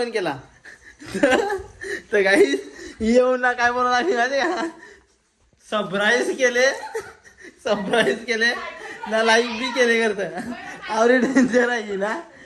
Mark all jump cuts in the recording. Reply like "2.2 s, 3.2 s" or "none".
none